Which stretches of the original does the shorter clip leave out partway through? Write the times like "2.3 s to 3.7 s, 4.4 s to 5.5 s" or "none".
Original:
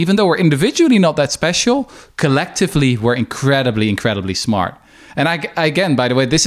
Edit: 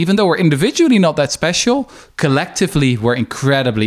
none